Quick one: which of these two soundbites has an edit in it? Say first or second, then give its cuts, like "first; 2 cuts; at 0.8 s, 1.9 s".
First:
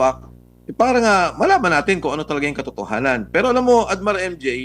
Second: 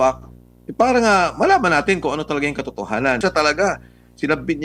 second; 1 cut; at 3.2 s